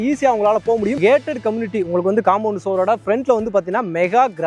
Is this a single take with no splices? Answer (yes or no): no